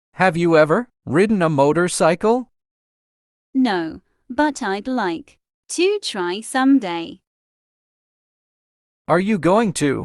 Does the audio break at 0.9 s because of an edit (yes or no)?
yes